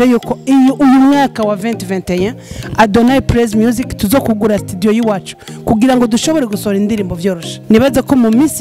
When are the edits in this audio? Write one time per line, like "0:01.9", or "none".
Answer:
0:07.5